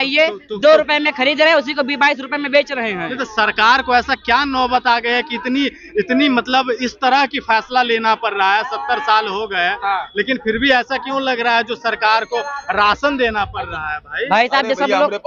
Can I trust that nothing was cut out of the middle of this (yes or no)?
yes